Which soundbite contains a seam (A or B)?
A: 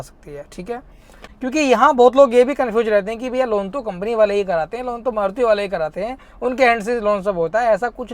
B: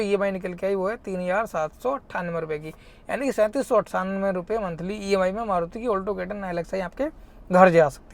A